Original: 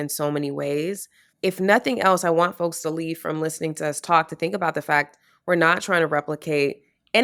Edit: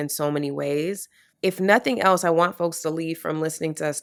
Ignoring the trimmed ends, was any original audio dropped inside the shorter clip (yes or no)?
no